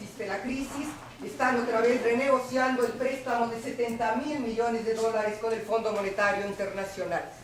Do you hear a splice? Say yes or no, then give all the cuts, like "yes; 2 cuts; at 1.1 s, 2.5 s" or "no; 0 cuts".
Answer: no; 0 cuts